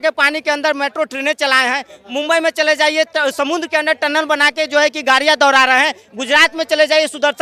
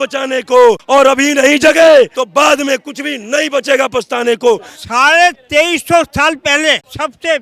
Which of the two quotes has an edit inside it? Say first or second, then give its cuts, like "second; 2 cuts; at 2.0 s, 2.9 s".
second; 3 cuts; at 0.8 s, 2.2 s, 4.7 s